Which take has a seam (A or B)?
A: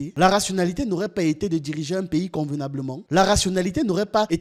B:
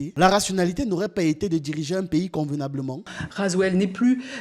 B